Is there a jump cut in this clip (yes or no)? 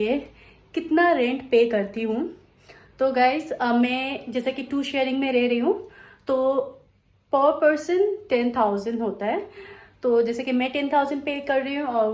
no